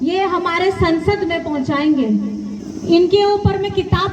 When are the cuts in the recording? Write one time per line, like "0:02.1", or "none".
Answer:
0:02.6